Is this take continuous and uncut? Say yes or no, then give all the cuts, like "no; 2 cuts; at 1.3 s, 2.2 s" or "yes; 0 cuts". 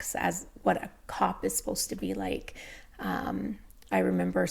yes; 0 cuts